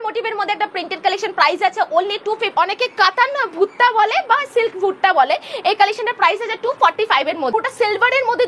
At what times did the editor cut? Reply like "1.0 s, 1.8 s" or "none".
2.5 s, 7.5 s